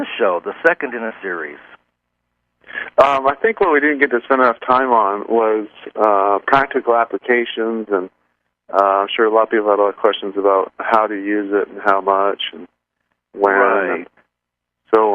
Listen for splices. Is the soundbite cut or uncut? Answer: cut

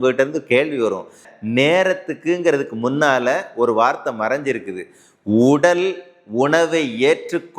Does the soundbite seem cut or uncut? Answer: cut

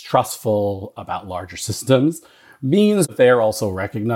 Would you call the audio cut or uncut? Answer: cut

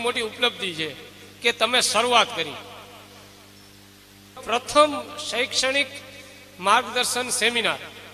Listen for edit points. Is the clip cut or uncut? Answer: cut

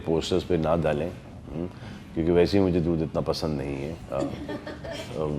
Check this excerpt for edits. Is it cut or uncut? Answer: uncut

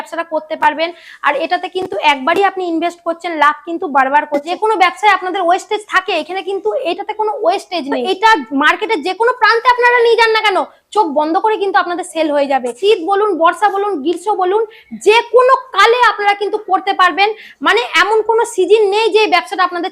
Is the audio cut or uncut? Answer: cut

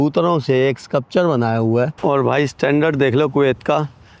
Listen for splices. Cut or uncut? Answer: cut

